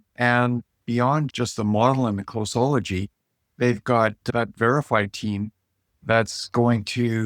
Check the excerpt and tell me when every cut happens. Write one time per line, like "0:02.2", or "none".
0:01.3
0:04.2